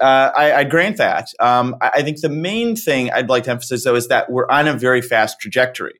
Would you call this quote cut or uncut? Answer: uncut